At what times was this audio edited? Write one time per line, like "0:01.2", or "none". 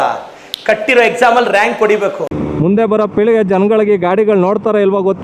0:02.3

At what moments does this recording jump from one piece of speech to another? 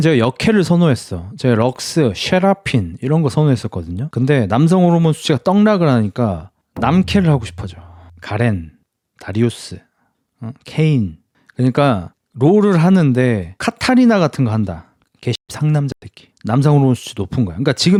none

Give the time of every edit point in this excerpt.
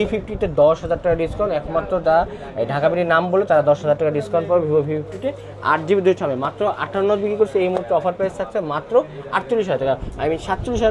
none

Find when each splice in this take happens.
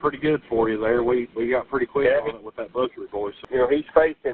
0:03.4

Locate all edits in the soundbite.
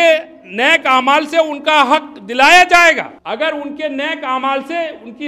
0:03.2

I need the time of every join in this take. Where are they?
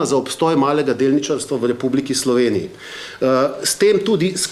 none

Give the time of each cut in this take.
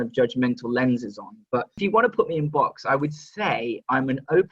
0:01.8

